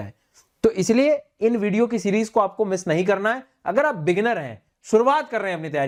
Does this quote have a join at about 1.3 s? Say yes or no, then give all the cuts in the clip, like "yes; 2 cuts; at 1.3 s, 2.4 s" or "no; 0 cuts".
no; 0 cuts